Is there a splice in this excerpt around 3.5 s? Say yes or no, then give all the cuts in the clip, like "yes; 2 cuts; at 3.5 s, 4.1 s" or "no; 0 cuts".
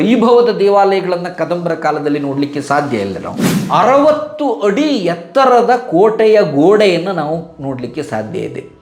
yes; 1 cut; at 3.5 s